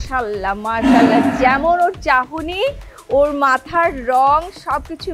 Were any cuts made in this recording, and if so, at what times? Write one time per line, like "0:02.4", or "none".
none